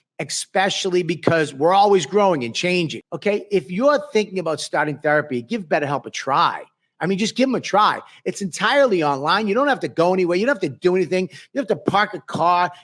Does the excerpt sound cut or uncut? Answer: cut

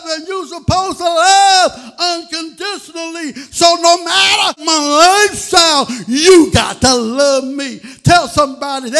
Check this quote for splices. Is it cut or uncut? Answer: cut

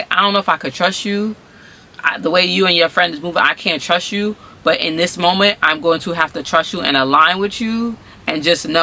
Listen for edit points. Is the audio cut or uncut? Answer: uncut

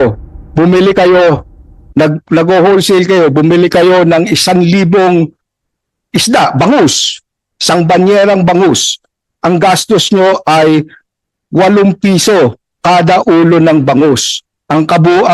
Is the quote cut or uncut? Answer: uncut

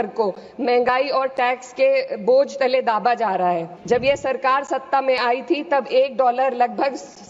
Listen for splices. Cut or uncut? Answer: cut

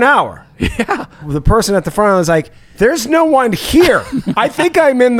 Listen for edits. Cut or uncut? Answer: cut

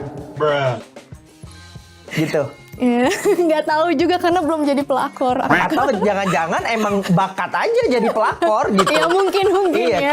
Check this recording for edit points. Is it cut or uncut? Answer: uncut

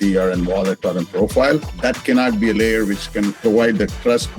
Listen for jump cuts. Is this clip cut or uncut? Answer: cut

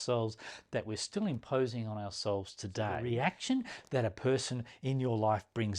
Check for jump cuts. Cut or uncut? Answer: cut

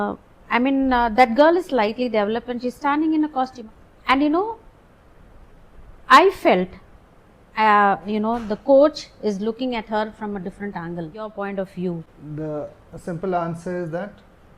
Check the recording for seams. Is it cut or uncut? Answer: cut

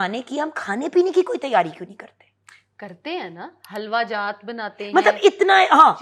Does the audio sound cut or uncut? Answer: uncut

